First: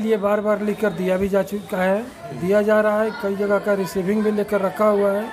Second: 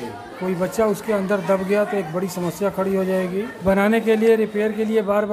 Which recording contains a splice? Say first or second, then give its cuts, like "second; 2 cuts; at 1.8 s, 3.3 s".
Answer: second; 1 cut; at 3.5 s